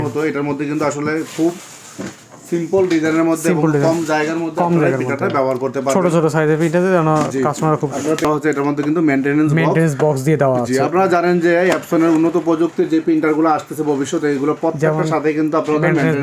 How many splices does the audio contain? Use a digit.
1